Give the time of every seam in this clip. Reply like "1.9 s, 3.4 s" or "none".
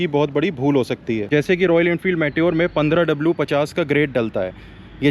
1.2 s

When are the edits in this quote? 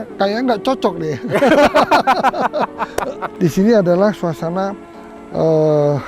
3.2 s

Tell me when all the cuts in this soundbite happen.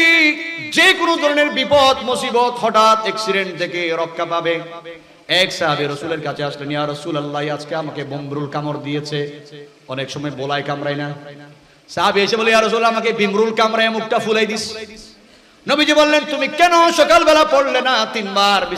none

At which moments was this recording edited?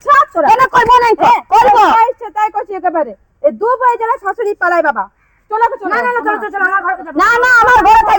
none

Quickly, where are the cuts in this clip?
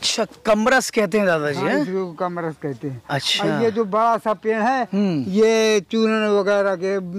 none

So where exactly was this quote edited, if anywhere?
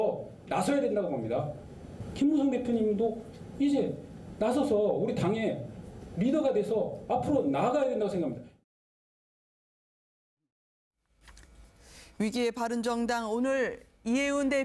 13.1 s

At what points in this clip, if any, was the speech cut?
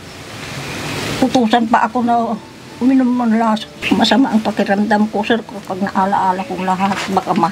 3.7 s

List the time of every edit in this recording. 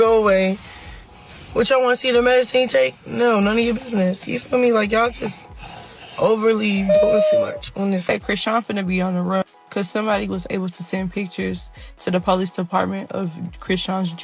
8.1 s

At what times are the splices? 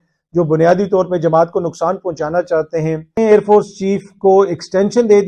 3.2 s

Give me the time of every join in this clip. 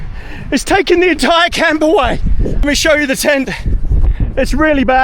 2.6 s

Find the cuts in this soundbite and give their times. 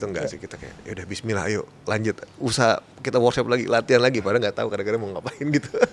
none

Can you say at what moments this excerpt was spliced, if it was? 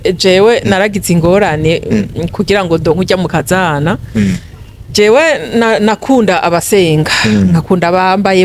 none

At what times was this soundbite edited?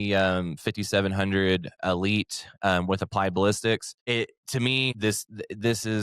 3.9 s, 4.9 s

